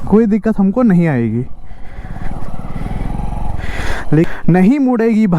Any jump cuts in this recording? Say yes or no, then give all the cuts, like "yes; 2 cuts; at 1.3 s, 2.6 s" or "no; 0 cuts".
yes; 1 cut; at 4.3 s